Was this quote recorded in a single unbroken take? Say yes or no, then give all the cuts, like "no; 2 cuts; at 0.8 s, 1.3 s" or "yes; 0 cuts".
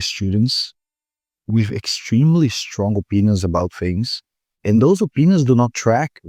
yes; 0 cuts